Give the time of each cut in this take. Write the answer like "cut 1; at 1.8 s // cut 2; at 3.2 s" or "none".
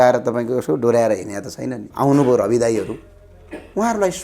cut 1; at 1.8 s